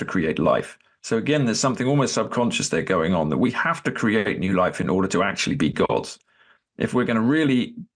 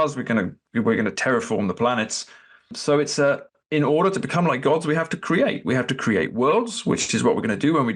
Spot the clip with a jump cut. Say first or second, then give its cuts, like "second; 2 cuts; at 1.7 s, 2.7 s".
second; 2 cuts; at 2.8 s, 3.5 s